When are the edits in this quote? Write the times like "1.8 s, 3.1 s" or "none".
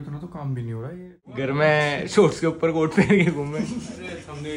1.3 s